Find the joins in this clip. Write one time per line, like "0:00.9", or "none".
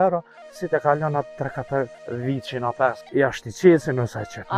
0:02.0
0:03.0

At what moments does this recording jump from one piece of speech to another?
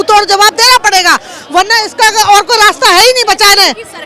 none

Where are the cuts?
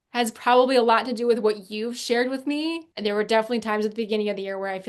0:02.8

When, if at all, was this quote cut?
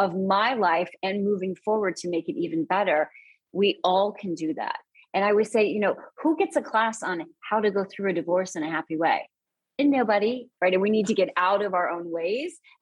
0:10.5

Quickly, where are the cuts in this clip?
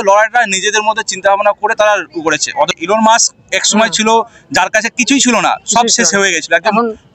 0:02.7

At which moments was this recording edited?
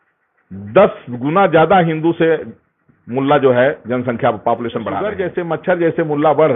0:05.2

